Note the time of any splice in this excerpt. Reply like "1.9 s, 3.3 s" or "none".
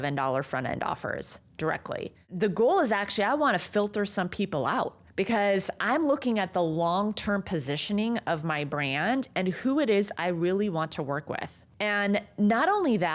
none